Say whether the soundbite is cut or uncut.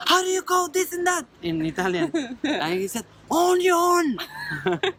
uncut